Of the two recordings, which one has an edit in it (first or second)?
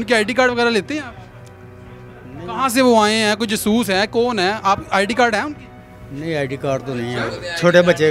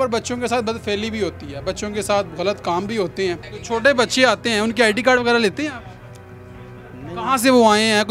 second